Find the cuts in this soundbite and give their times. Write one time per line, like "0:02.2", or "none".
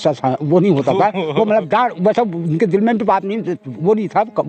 none